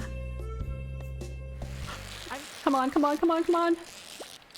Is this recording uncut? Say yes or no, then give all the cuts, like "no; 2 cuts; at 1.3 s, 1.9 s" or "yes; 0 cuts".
no; 1 cut; at 2.1 s